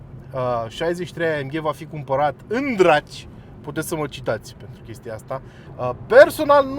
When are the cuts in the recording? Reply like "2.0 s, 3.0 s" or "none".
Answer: 5.6 s